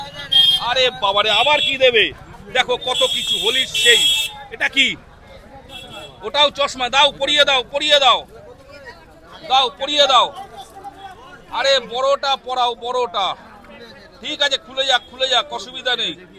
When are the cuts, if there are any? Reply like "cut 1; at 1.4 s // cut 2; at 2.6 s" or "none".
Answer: none